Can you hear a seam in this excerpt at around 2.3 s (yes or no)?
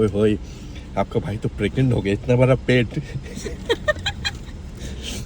yes